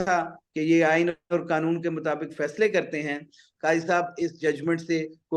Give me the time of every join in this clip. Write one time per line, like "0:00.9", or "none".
0:03.4